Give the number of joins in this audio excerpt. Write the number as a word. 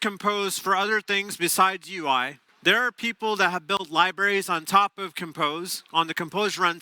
one